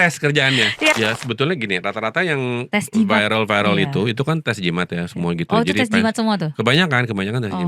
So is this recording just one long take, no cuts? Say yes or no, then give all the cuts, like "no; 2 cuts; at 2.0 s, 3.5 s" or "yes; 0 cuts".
no; 1 cut; at 0.9 s